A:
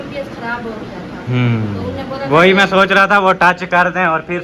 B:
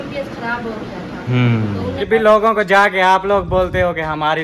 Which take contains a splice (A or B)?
B